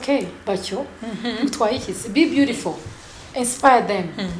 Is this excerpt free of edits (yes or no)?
yes